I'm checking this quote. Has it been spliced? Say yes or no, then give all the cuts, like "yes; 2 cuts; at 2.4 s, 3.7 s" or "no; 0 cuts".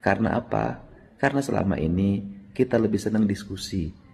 no; 0 cuts